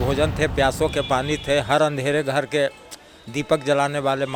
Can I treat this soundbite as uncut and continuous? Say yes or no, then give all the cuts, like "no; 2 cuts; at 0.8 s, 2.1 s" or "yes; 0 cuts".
yes; 0 cuts